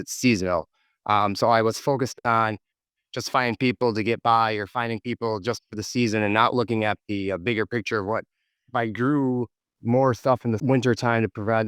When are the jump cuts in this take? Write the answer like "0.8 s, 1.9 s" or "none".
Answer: 10.6 s